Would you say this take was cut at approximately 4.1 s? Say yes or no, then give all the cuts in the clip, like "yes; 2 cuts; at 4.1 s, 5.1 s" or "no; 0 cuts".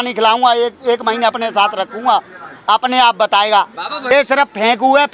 yes; 1 cut; at 4.1 s